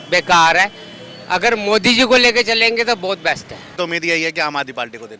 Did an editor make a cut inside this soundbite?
yes; 1 cut; at 3.7 s

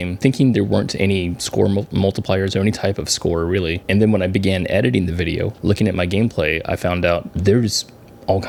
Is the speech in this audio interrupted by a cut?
no; 0 cuts

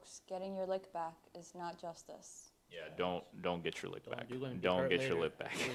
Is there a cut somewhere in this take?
no; 0 cuts

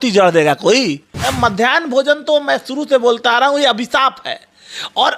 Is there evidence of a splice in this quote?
yes; 1 cut; at 1.3 s

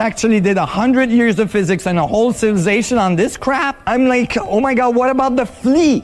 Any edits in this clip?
no; 0 cuts

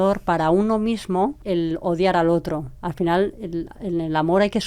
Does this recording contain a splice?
yes; 2 cuts; at 1.4 s, 2.8 s

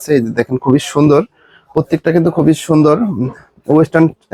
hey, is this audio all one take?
yes; 0 cuts

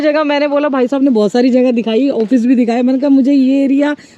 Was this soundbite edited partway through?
no; 0 cuts

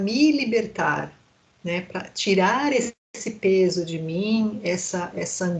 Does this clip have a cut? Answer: no; 0 cuts

